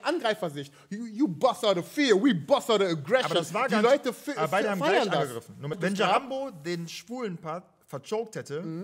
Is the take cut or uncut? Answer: cut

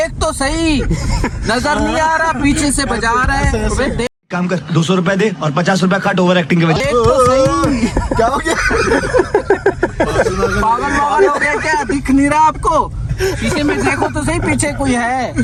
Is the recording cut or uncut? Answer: uncut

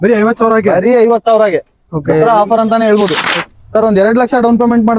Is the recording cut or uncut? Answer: cut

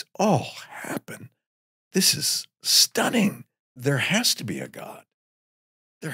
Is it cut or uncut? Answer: cut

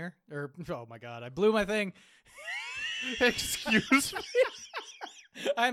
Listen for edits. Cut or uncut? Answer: uncut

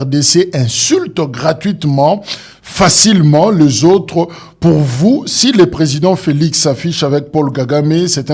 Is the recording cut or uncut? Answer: uncut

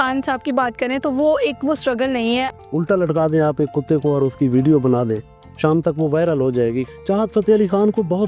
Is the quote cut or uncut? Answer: cut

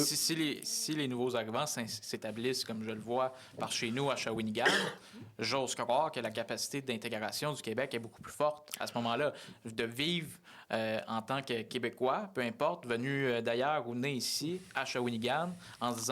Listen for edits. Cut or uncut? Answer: uncut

